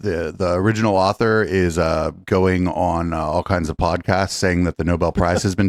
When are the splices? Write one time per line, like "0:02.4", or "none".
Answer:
none